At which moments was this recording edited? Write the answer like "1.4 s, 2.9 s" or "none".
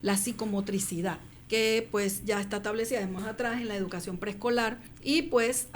1.3 s, 3.2 s, 4.9 s